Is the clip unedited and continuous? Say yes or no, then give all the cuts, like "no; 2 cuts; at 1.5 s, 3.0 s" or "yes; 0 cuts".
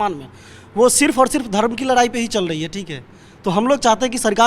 yes; 0 cuts